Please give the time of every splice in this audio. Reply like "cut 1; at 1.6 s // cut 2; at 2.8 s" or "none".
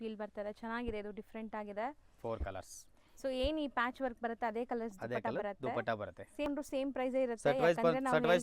cut 1; at 6.5 s